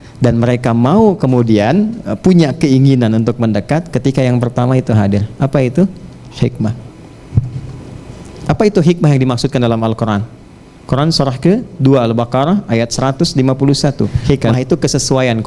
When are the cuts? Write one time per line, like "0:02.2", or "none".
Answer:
0:14.2